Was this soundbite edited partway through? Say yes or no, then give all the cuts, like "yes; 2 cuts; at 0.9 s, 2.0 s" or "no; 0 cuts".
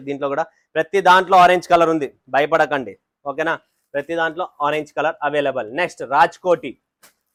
no; 0 cuts